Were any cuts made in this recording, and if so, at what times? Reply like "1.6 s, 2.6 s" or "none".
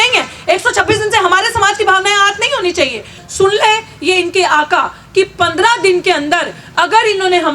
3.2 s